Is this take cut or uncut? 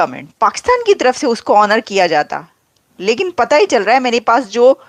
uncut